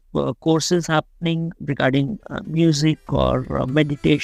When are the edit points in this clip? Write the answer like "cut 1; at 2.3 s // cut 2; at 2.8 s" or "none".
cut 1; at 1.6 s